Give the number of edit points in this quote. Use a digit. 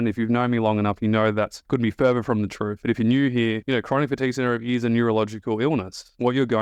2